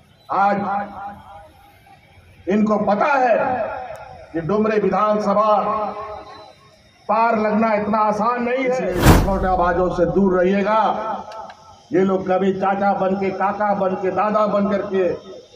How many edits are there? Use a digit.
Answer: 1